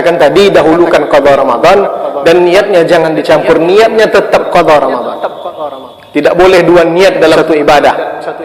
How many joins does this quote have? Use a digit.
1